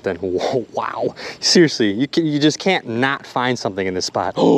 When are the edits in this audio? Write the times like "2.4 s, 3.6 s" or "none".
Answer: none